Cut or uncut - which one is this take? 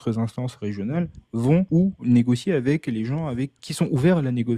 cut